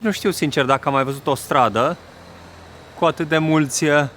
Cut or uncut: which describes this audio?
uncut